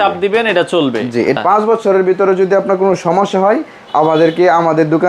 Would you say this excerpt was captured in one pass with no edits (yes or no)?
no